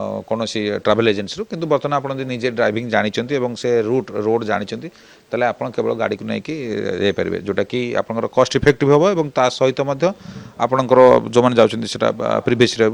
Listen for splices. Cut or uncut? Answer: uncut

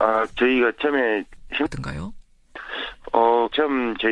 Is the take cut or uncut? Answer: uncut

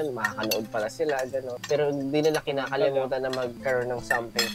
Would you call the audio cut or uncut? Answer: cut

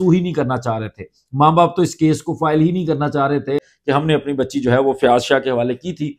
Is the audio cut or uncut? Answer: cut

